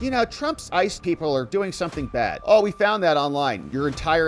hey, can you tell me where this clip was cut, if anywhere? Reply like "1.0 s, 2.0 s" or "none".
none